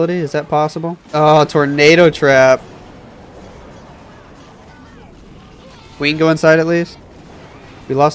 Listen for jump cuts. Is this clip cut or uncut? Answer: cut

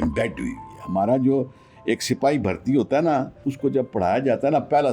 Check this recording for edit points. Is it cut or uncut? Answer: cut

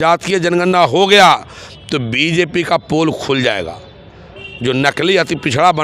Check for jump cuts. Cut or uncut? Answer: uncut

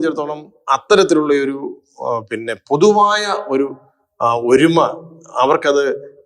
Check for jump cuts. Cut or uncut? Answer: uncut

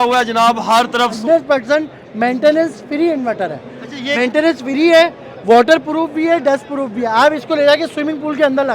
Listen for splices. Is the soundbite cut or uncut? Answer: cut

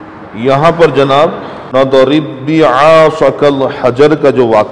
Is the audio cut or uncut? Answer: cut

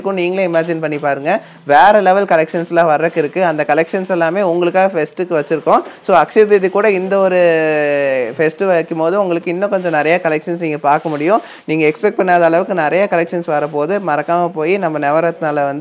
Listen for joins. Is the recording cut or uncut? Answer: uncut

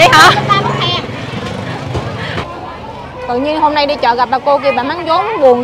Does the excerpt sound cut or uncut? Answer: cut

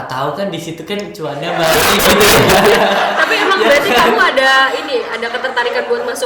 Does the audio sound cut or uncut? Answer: uncut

